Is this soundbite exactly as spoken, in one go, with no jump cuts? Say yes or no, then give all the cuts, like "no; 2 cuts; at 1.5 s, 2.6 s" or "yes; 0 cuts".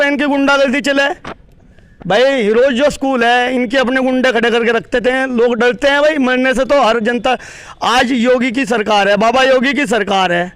yes; 0 cuts